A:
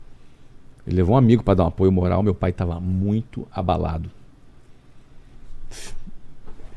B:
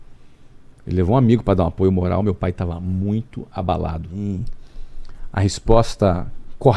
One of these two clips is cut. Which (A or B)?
B